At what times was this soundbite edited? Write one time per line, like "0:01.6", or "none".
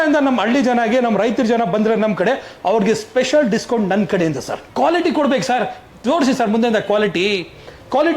0:04.6